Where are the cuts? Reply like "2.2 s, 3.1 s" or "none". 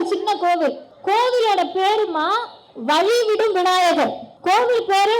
0.9 s, 4.3 s